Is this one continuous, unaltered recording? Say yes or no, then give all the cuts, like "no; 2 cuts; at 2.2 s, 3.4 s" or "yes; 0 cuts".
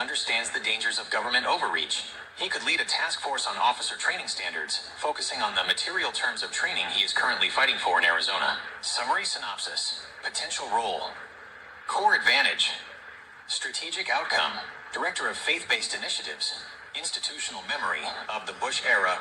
yes; 0 cuts